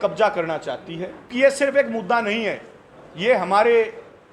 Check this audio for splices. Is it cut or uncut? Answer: cut